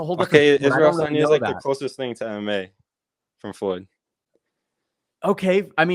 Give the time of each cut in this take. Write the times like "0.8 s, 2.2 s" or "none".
none